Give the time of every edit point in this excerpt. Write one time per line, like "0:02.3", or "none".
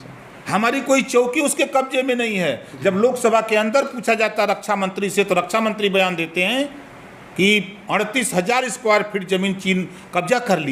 none

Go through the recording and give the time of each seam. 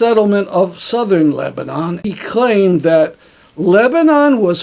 0:02.0

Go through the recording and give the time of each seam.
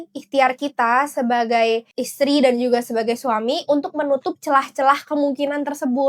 none

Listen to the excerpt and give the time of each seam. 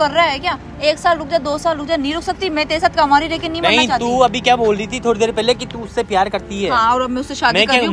none

